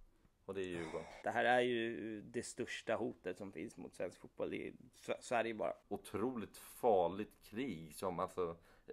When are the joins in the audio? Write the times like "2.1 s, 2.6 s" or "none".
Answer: 1.2 s, 5.9 s